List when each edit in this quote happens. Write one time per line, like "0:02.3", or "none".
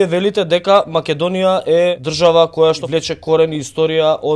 0:02.1
0:02.8